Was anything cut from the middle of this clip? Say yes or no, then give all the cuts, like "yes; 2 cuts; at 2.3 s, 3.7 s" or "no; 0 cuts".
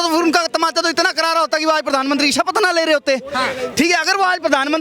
no; 0 cuts